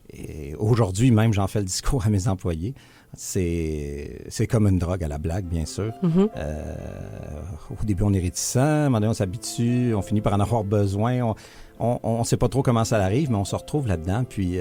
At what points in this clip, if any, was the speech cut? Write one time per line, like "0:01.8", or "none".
none